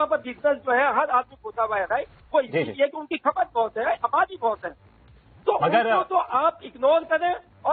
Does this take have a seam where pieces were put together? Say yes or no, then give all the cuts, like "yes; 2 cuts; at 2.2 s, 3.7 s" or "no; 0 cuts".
no; 0 cuts